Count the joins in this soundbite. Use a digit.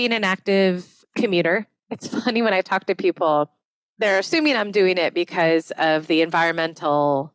1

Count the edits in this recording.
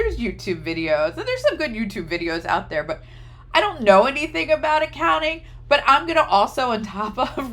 0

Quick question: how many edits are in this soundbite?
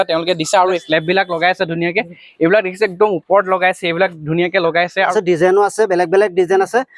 2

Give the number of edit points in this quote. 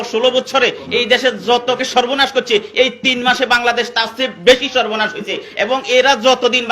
1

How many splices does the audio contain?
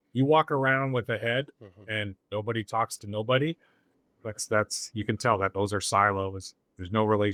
0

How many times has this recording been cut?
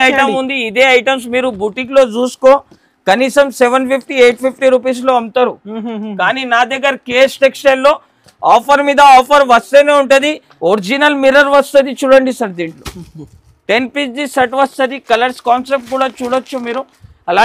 1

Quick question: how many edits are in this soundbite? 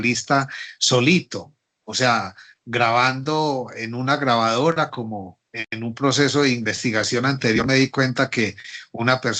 0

